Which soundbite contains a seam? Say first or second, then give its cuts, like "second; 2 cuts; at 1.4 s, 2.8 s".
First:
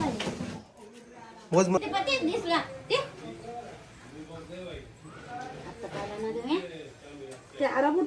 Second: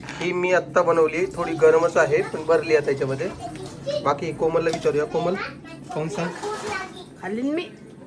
first; 1 cut; at 1.8 s